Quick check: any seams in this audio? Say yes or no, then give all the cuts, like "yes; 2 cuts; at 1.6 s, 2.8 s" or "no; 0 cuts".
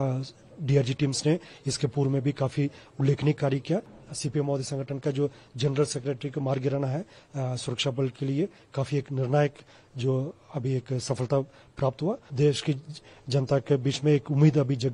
yes; 2 cuts; at 4.0 s, 12.3 s